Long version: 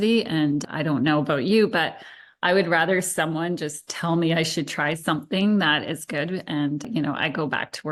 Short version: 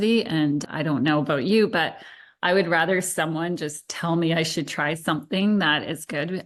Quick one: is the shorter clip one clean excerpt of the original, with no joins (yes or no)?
yes